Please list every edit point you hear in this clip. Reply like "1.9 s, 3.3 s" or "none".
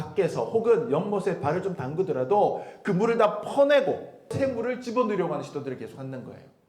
4.3 s

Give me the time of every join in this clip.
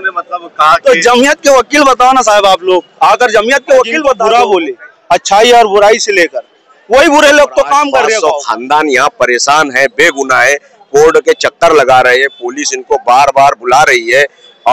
4.2 s, 8.2 s

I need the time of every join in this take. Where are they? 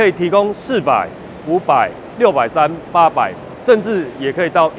none

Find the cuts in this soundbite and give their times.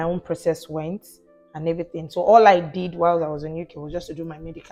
none

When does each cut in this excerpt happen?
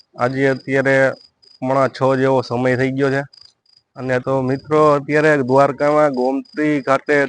4.2 s

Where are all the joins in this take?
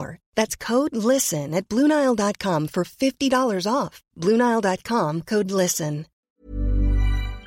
6.2 s

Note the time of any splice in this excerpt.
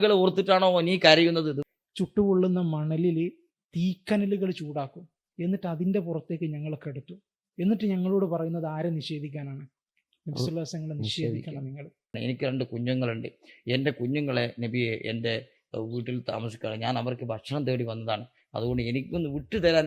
1.6 s, 12.2 s

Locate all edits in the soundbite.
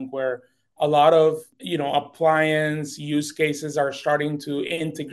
1.5 s

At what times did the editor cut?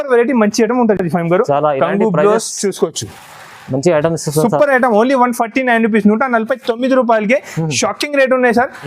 none

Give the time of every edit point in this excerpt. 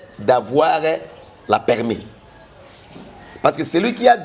none

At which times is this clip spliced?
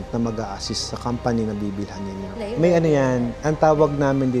2.3 s

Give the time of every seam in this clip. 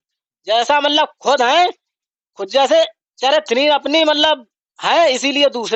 none

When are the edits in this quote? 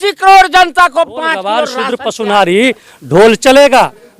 1.7 s

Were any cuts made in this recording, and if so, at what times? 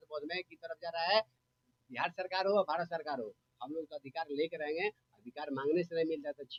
none

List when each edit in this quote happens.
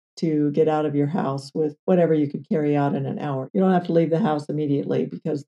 1.8 s, 3.4 s

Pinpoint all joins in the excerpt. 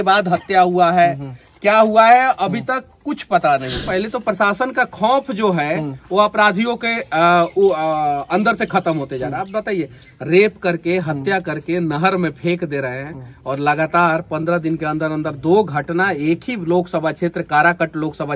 3.8 s

